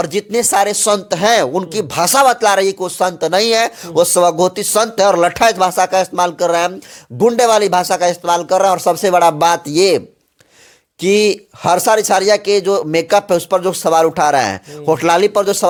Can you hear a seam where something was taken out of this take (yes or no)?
no